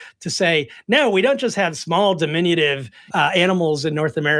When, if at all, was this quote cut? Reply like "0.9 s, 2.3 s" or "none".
none